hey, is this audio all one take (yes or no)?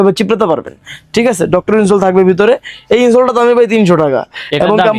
yes